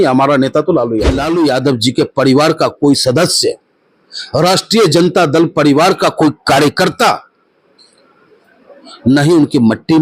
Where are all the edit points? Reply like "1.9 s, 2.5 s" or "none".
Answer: 1.2 s